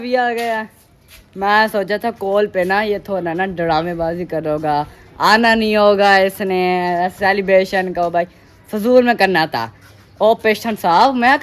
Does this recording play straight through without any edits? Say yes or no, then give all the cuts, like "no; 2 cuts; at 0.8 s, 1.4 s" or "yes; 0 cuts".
yes; 0 cuts